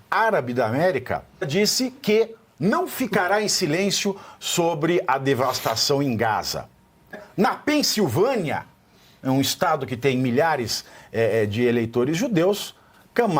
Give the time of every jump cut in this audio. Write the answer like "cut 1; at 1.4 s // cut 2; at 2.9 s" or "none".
cut 1; at 1.5 s // cut 2; at 7.2 s